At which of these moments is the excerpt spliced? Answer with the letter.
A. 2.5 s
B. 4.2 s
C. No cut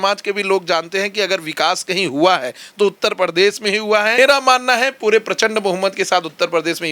B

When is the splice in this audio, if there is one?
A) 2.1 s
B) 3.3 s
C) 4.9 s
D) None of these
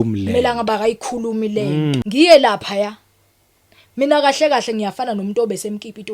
A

